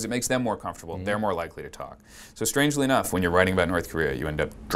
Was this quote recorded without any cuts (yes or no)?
yes